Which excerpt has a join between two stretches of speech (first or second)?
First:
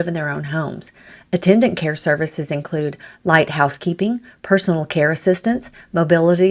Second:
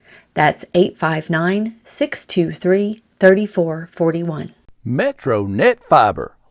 second